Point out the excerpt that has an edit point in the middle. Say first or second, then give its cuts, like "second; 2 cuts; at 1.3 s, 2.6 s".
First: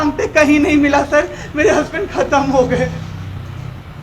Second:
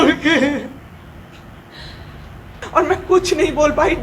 second; 1 cut; at 2.6 s